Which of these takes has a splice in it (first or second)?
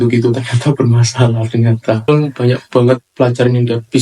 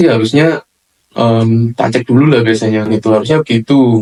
first